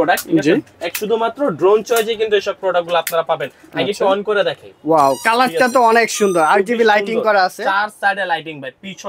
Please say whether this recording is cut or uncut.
uncut